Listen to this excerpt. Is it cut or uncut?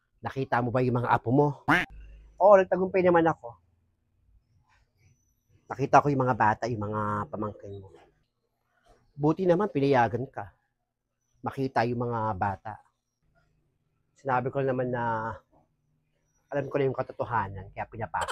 uncut